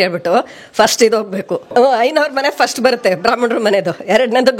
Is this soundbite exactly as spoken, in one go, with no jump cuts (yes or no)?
no